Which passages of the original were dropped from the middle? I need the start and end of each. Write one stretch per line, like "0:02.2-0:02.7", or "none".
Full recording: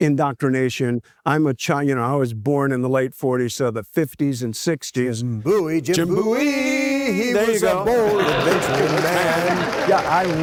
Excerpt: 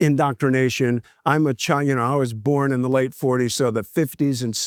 none